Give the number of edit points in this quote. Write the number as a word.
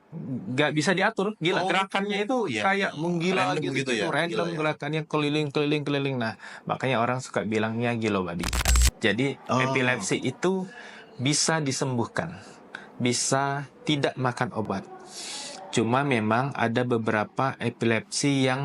one